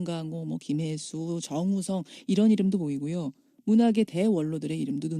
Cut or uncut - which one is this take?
cut